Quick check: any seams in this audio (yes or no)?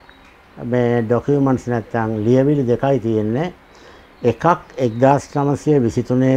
no